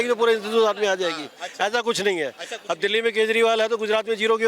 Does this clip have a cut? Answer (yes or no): no